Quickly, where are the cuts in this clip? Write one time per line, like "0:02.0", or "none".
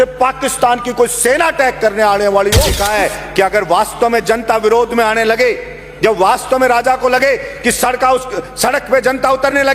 0:02.7